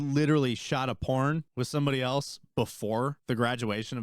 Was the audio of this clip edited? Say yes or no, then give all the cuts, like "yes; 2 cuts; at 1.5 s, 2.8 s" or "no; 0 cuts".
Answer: yes; 2 cuts; at 1.5 s, 3.2 s